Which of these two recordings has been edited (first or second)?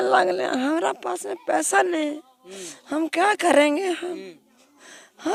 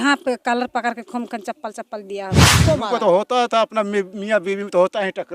second